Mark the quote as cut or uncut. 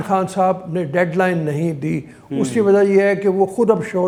uncut